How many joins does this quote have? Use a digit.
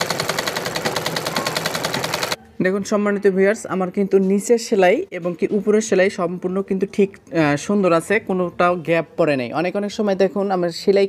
1